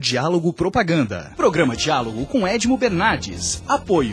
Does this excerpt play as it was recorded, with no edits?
no; 1 cut; at 1.2 s

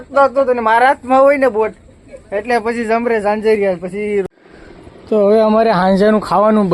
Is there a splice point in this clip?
yes; 1 cut; at 4.3 s

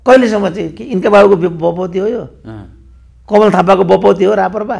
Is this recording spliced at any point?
no; 0 cuts

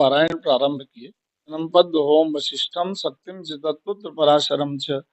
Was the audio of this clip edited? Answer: yes; 1 cut; at 1.6 s

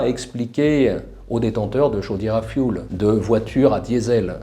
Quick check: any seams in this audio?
no; 0 cuts

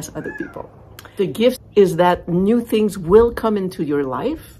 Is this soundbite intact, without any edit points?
no; 1 cut; at 1.0 s

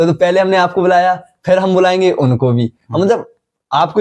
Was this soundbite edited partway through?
no; 0 cuts

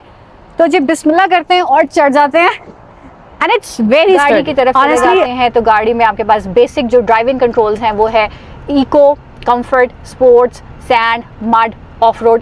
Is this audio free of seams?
no; 1 cut; at 5.3 s

